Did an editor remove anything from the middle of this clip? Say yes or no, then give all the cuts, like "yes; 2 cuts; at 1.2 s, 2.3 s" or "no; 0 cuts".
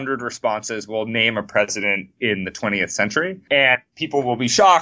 yes; 2 cuts; at 3.4 s, 3.9 s